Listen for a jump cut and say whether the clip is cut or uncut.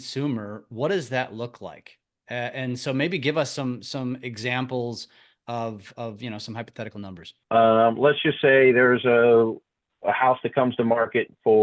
cut